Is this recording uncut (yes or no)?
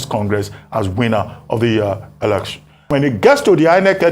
no